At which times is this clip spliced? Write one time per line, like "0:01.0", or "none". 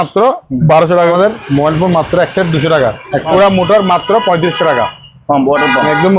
0:01.1
0:03.3